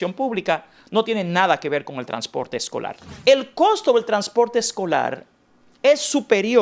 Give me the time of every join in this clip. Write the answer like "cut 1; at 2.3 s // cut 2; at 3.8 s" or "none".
cut 1; at 3.0 s

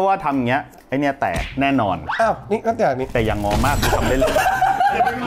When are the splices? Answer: cut 1; at 4.4 s

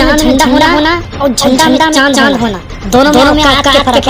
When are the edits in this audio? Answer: none

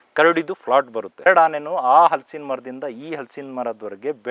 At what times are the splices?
cut 1; at 1.2 s

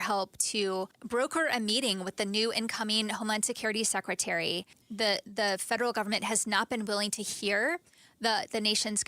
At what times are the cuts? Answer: cut 1; at 1.0 s // cut 2; at 4.8 s

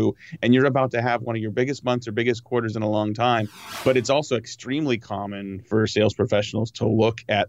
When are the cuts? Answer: cut 1; at 3.6 s // cut 2; at 5.7 s

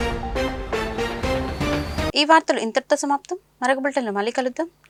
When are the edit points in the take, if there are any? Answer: none

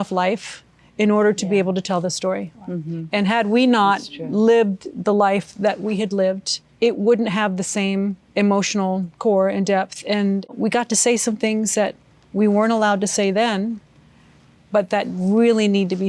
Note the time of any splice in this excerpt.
cut 1; at 6.7 s // cut 2; at 10.5 s

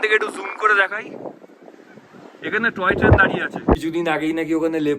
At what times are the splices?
cut 1; at 3.8 s

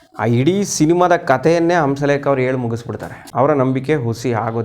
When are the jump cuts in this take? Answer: cut 1; at 3.2 s

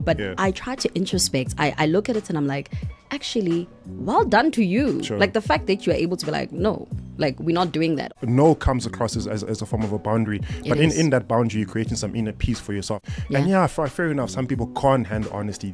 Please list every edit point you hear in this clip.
cut 1; at 8.1 s // cut 2; at 13.0 s

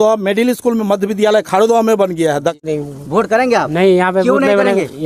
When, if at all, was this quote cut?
cut 1; at 2.6 s

